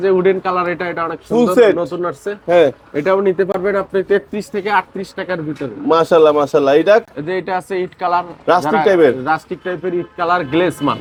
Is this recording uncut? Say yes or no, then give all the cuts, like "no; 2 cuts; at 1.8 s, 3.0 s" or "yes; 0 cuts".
yes; 0 cuts